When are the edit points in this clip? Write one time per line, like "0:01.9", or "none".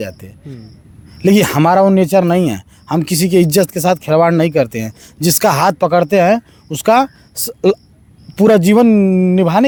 none

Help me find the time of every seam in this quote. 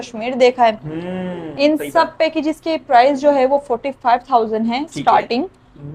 none

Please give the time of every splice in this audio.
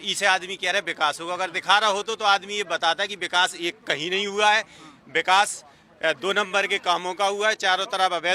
none

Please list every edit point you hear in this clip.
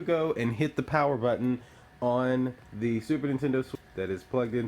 0:03.7

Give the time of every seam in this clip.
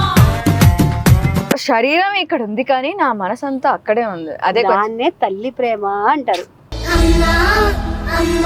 0:01.5

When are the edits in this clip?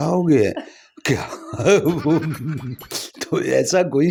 none

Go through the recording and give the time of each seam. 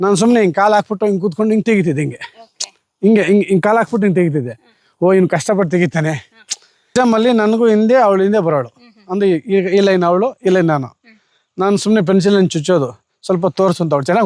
0:06.9

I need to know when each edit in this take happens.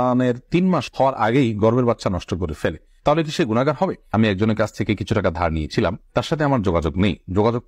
0:04.1

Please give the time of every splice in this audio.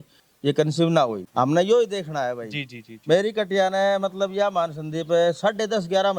0:01.2

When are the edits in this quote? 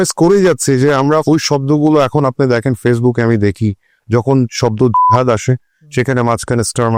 none

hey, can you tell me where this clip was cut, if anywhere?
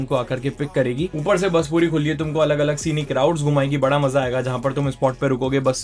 none

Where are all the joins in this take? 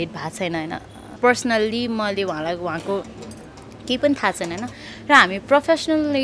0:01.2

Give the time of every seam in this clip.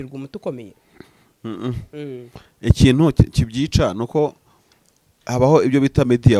none

